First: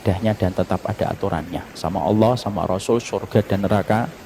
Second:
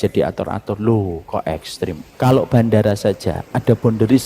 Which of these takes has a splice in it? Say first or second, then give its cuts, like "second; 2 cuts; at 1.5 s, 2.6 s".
second; 1 cut; at 2.0 s